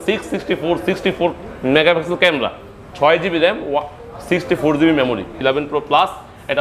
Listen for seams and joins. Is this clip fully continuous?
no; 1 cut; at 5.4 s

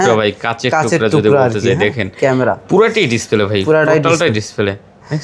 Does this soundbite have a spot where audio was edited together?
no; 0 cuts

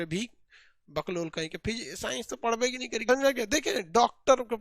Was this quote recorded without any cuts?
no; 1 cut; at 3.1 s

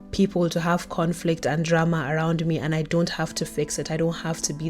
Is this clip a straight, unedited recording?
yes; 0 cuts

